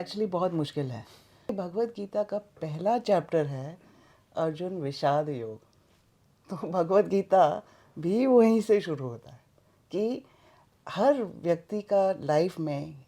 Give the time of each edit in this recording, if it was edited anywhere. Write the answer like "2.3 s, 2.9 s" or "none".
1.5 s

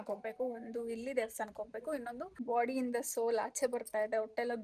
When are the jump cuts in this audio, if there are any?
2.3 s

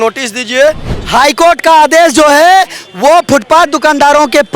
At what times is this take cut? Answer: 0.9 s

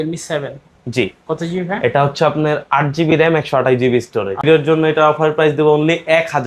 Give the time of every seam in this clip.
4.4 s

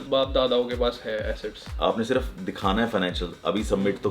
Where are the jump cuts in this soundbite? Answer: 1.7 s

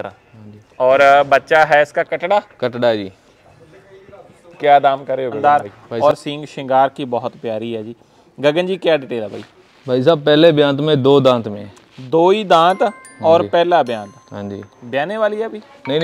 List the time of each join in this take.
5.4 s

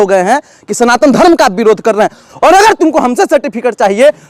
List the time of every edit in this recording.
2.2 s

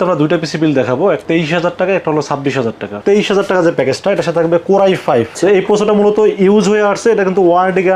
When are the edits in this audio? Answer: 1.2 s, 3.0 s, 5.3 s

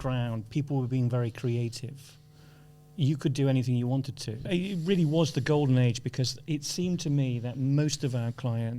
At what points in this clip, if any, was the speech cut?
4.5 s

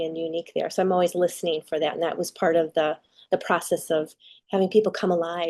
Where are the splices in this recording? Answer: 4.3 s

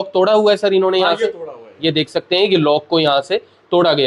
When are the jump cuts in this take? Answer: none

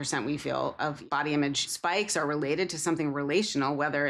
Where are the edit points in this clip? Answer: 1.0 s, 1.7 s

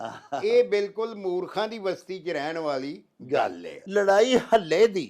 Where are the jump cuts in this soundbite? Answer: 3.7 s

